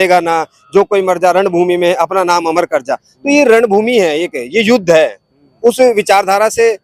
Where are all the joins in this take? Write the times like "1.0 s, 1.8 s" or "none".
none